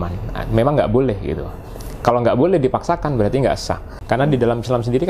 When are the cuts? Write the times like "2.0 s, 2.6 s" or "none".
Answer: 3.9 s